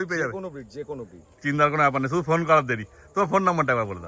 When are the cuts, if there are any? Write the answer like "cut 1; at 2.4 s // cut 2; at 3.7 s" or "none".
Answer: none